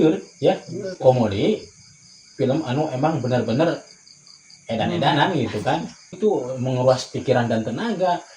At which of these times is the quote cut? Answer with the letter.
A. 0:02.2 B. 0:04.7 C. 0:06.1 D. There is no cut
C